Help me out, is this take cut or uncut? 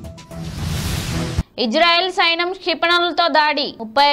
cut